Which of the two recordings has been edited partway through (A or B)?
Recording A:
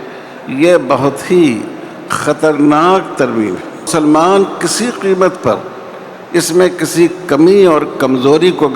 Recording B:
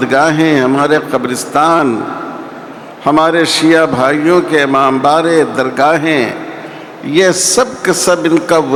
A